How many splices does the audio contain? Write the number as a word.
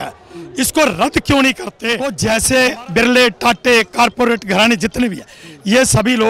one